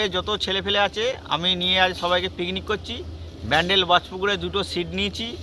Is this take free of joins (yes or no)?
yes